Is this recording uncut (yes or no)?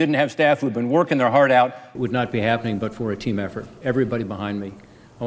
no